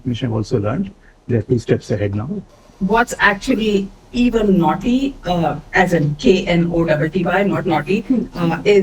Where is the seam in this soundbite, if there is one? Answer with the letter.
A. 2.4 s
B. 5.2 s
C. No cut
A